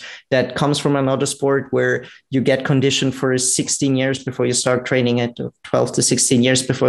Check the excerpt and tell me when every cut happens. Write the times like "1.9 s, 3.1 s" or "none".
none